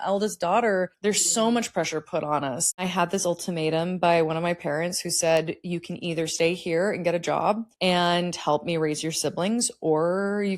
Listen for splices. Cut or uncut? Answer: cut